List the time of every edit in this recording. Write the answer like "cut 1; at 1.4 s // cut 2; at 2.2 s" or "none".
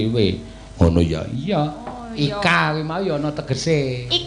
none